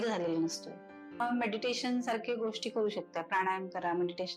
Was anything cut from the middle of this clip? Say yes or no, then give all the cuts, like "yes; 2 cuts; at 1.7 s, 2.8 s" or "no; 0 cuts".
yes; 1 cut; at 1.2 s